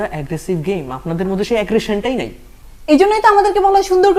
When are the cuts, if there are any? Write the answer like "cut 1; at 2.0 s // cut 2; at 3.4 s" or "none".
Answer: none